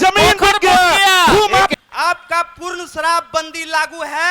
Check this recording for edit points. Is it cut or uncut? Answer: cut